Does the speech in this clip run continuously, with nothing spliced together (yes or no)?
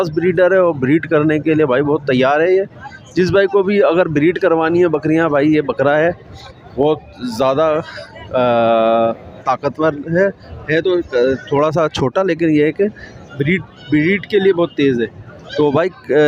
yes